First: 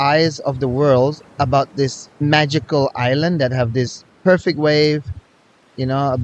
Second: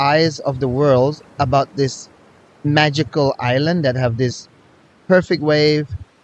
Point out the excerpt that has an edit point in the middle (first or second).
first